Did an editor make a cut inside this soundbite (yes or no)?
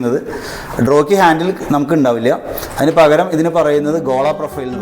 no